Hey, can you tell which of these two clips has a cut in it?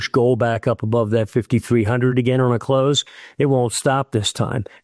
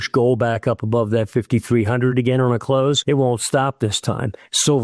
second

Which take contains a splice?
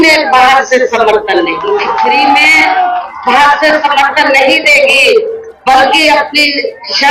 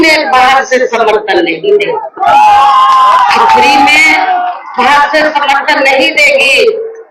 first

